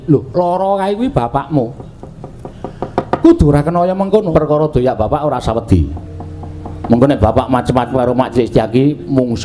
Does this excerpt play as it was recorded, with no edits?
no; 1 cut; at 4.3 s

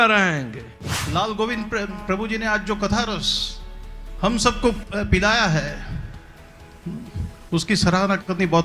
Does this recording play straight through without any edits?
no; 1 cut; at 1.0 s

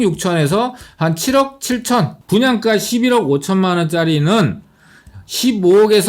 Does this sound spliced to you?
yes; 1 cut; at 2.2 s

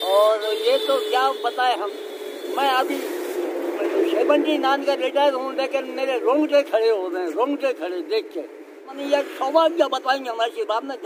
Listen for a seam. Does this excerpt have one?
yes; 1 cut; at 8.9 s

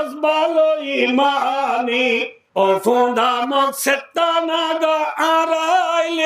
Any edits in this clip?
yes; 1 cut; at 2.4 s

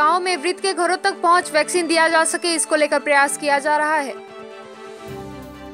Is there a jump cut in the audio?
yes; 1 cut; at 4.2 s

